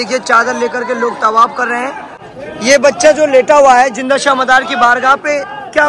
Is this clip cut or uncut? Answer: cut